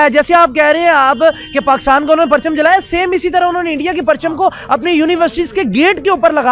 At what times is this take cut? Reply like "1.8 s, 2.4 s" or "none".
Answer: none